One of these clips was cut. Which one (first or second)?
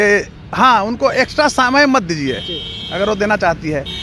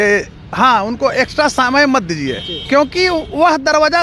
second